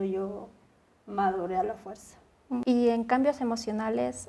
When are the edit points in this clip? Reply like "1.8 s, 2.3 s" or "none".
2.6 s